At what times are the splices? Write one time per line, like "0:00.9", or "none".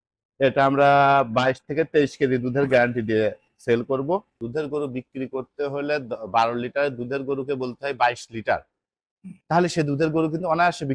0:04.4